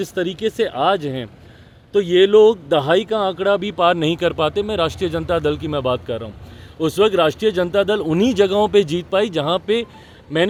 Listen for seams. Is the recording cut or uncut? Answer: uncut